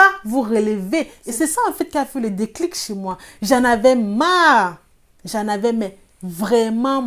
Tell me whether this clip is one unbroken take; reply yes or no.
no